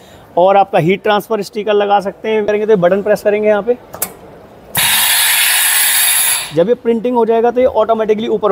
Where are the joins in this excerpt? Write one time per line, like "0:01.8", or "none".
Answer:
0:02.5